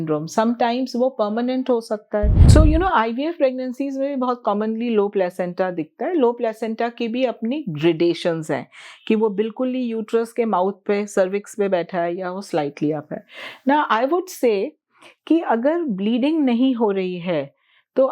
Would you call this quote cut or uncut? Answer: cut